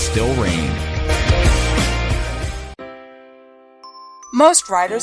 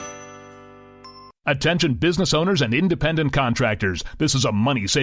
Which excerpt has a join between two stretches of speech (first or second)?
second